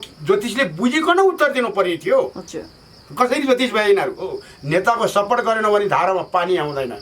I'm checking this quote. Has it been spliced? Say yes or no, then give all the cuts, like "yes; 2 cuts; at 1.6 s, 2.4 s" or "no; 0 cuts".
yes; 1 cut; at 4.5 s